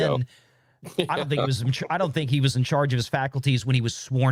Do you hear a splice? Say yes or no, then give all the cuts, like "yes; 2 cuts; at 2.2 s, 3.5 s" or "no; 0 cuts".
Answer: no; 0 cuts